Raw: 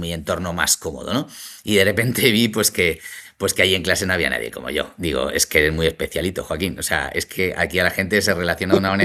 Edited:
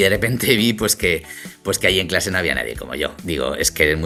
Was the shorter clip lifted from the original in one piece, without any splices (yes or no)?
yes